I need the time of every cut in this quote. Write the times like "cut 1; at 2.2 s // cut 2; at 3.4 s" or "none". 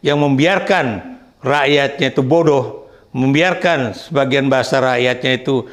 none